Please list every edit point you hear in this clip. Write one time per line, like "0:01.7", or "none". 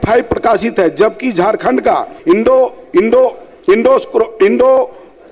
0:02.1